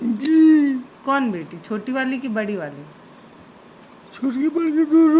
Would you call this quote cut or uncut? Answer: cut